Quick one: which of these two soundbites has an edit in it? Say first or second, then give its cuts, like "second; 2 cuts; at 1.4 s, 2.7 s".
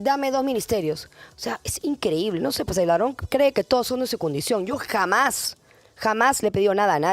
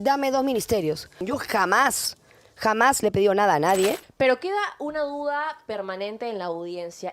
second; 2 cuts; at 1.2 s, 4.0 s